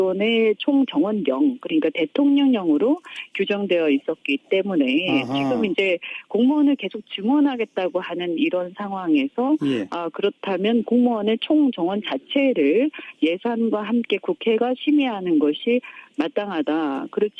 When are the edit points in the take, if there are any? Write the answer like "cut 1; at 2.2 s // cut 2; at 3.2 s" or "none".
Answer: cut 1; at 9.9 s